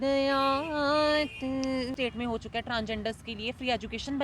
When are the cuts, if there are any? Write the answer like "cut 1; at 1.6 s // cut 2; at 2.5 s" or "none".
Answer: cut 1; at 2.0 s